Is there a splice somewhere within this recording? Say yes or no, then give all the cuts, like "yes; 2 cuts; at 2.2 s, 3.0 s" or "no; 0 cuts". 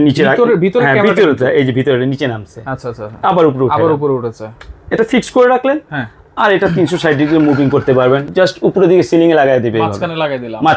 yes; 1 cut; at 8.3 s